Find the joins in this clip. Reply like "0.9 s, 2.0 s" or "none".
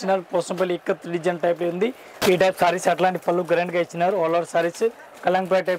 2.2 s